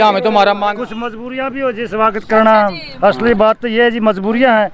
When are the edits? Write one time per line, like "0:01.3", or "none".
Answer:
none

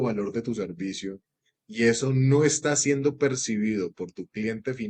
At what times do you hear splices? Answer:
none

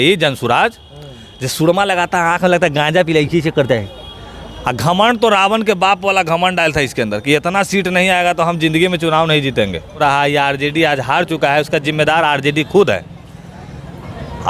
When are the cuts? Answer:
0:10.0

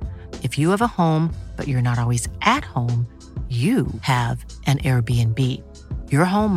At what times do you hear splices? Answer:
none

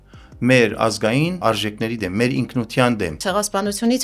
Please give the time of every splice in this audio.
0:01.4
0:03.2

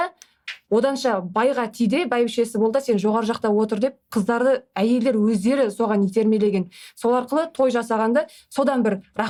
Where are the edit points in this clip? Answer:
none

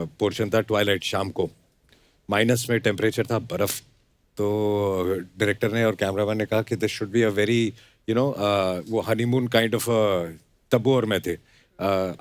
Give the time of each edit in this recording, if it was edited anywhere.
none

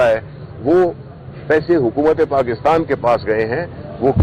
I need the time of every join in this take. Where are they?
none

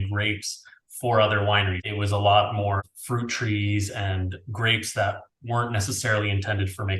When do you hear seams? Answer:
0:01.8
0:02.8

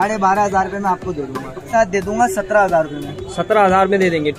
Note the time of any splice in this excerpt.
0:01.6

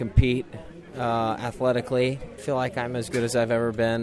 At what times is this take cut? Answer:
0:02.3

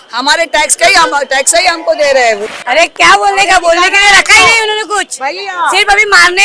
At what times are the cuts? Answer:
0:02.4

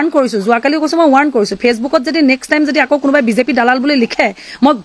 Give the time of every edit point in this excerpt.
none

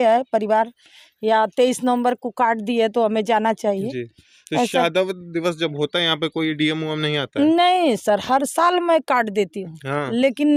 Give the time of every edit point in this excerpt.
none

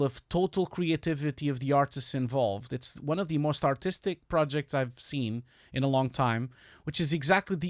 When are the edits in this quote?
none

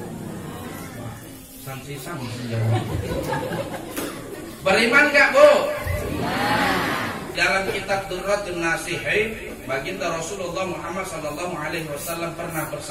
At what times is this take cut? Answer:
0:07.3

